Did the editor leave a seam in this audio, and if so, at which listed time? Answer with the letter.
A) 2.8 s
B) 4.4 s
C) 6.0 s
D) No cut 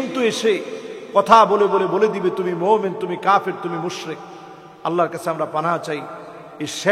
D